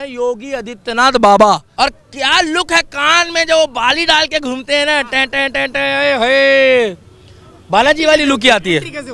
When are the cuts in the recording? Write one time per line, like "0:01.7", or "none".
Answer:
0:01.7